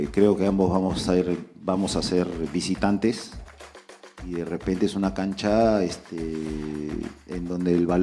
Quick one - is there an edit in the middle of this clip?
no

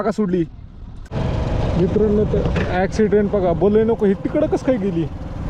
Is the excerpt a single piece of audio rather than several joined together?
no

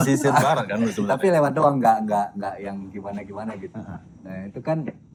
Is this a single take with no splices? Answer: yes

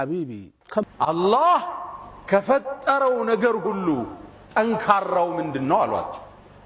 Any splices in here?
yes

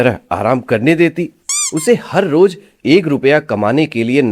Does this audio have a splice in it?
no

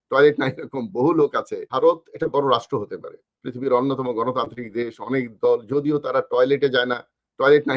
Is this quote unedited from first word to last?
no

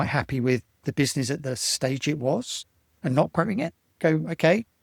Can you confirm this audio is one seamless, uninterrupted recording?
yes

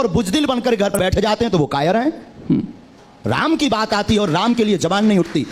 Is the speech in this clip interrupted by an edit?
yes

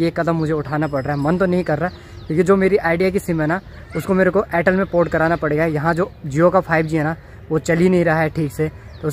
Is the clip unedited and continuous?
yes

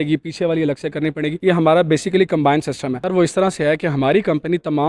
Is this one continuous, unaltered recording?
no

